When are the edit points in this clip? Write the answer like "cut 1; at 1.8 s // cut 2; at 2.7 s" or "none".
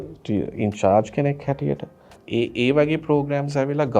cut 1; at 2.2 s